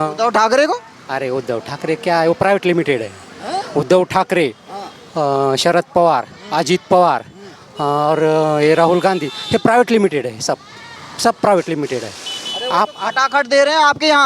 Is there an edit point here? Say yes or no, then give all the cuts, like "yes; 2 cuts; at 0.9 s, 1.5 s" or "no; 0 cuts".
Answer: no; 0 cuts